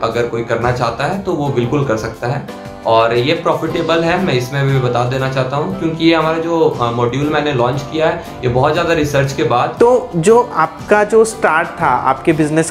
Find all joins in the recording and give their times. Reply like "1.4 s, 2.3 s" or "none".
9.8 s

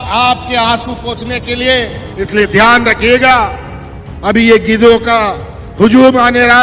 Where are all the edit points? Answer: 2.0 s

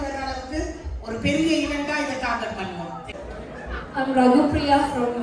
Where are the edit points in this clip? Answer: 2.6 s

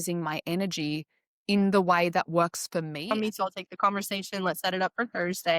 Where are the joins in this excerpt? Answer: 3.1 s

